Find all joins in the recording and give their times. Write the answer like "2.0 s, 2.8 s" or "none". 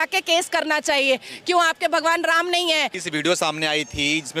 3.0 s